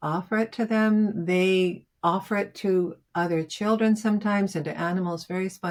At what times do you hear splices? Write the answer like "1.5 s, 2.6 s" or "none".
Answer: none